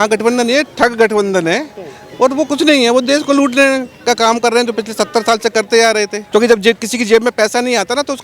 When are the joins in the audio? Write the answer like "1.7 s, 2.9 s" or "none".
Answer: 6.2 s